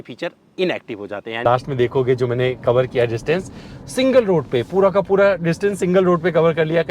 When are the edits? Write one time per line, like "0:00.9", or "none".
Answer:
0:01.3